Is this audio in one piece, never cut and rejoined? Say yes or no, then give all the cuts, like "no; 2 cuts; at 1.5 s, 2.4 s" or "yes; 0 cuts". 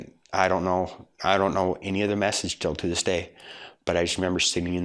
yes; 0 cuts